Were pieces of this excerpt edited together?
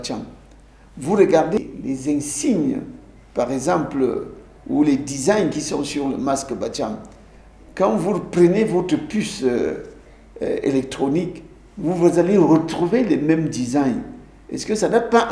yes; 1 cut; at 1.6 s

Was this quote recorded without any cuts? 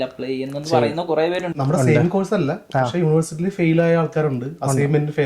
no; 1 cut; at 1.5 s

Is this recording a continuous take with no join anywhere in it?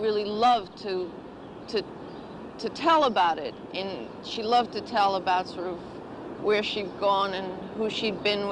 no; 1 cut; at 4.4 s

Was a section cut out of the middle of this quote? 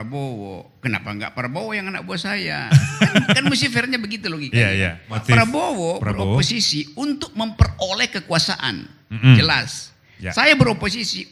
yes; 1 cut; at 5.2 s

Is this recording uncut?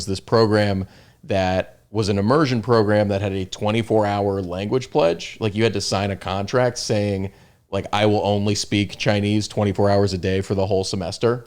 yes; 0 cuts

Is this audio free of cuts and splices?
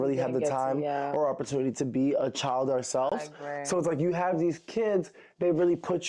yes; 0 cuts

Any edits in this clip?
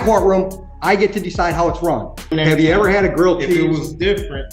yes; 1 cut; at 2.1 s

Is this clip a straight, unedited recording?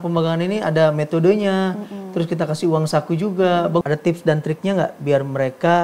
no; 1 cut; at 3.8 s

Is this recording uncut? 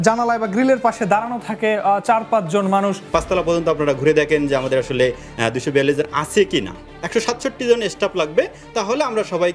no; 2 cuts; at 3.0 s, 6.8 s

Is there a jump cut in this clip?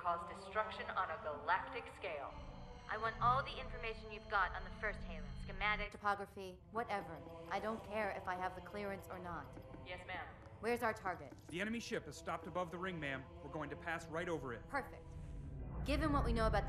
yes; 1 cut; at 7.0 s

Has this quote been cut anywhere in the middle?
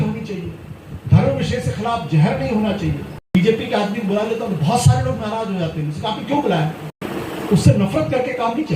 yes; 2 cuts; at 3.3 s, 7.0 s

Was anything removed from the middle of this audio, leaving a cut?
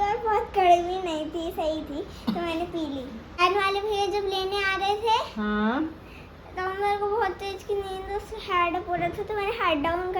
yes; 1 cut; at 3.4 s

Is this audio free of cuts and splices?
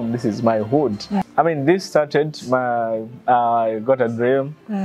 no; 1 cut; at 1.3 s

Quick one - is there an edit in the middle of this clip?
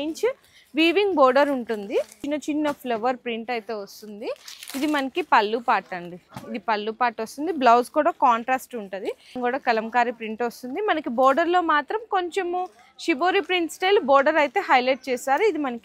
yes; 2 cuts; at 2.2 s, 9.4 s

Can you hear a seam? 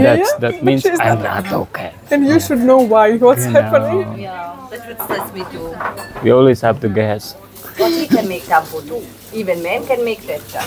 no; 0 cuts

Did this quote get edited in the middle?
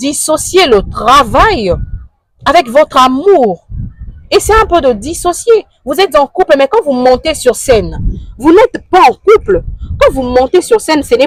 no; 0 cuts

